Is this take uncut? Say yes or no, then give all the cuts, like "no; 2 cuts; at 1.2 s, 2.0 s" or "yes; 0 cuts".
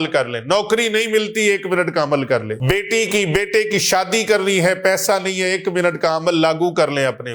no; 1 cut; at 2.5 s